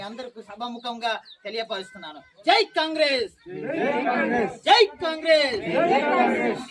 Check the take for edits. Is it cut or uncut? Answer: uncut